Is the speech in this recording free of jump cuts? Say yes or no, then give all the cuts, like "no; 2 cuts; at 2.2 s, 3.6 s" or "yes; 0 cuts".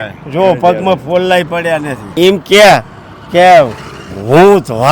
no; 1 cut; at 2.1 s